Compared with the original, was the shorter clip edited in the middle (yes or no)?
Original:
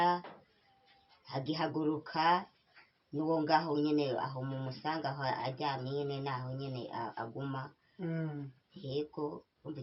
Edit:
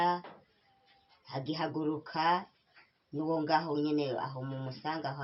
no